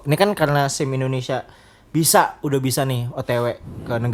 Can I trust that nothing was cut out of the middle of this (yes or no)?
yes